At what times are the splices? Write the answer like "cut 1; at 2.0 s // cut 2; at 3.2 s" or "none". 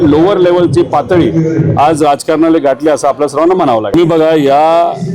cut 1; at 3.9 s

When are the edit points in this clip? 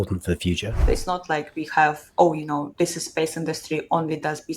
cut 1; at 0.9 s // cut 2; at 2.7 s

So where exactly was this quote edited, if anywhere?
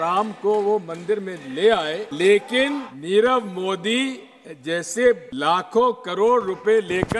cut 1; at 2.1 s // cut 2; at 2.9 s // cut 3; at 5.3 s

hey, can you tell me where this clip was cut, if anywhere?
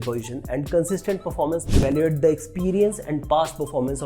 cut 1; at 1.7 s

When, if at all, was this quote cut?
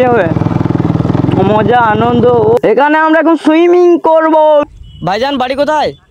cut 1; at 2.6 s // cut 2; at 4.7 s

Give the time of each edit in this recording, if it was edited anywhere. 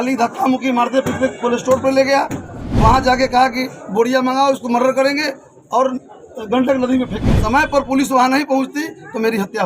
cut 1; at 7.3 s

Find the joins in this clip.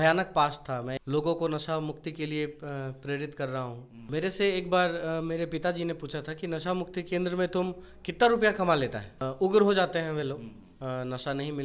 cut 1; at 1.0 s // cut 2; at 4.1 s // cut 3; at 9.2 s

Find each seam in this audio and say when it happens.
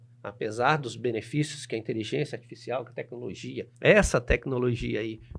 cut 1; at 3.6 s

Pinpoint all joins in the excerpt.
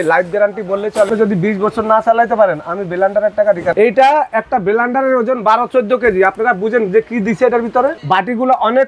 cut 1; at 1.1 s // cut 2; at 3.7 s // cut 3; at 8.0 s

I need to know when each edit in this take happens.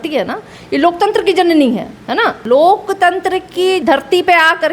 cut 1; at 2.4 s // cut 2; at 3.8 s

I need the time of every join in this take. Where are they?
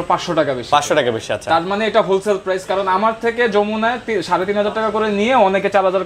none

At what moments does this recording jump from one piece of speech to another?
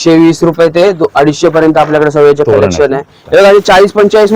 cut 1; at 3.2 s

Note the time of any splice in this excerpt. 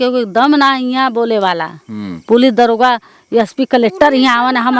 none

